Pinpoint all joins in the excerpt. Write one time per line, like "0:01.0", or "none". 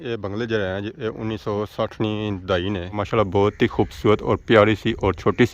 0:03.0